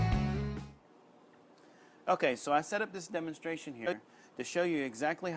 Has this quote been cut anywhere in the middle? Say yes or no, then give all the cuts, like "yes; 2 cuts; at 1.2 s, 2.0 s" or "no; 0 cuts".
yes; 1 cut; at 3.9 s